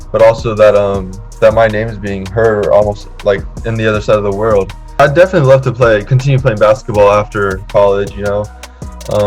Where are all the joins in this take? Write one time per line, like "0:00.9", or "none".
0:04.8